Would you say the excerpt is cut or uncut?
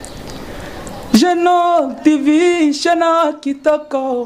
uncut